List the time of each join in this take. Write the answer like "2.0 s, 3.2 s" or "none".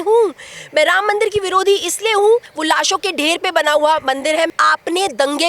2.5 s, 4.5 s